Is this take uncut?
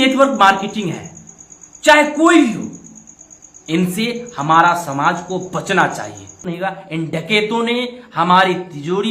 no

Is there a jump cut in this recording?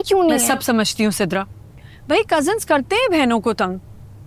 no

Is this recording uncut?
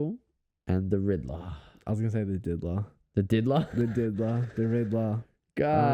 yes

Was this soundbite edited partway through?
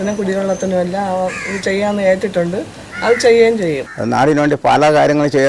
yes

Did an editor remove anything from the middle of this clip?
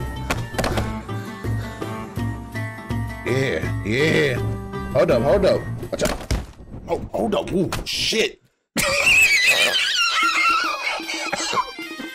yes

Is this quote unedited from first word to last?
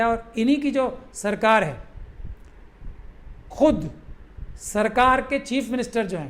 yes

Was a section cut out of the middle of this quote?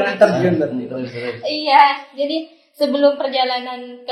no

